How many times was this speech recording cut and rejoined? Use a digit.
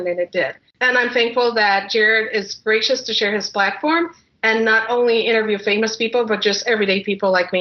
0